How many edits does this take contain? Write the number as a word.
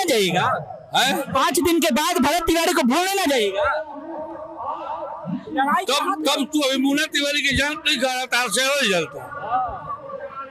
zero